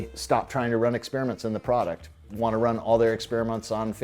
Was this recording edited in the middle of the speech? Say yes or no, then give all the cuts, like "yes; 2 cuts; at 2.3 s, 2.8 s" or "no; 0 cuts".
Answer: yes; 1 cut; at 2.2 s